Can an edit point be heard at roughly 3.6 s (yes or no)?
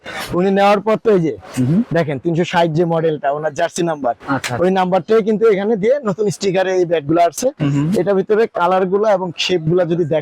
no